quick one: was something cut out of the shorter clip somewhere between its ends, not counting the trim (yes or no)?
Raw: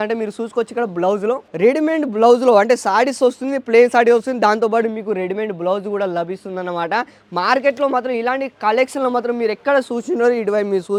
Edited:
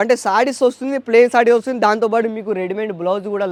no